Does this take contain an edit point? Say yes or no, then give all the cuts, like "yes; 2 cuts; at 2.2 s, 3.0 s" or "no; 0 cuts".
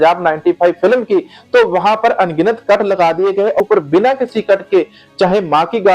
yes; 1 cut; at 3.6 s